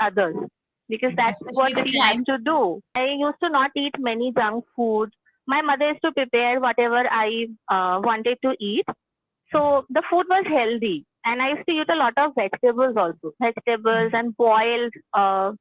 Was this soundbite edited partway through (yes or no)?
yes